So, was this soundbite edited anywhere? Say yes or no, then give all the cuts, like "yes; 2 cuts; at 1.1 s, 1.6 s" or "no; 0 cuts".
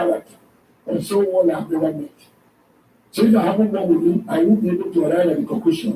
no; 0 cuts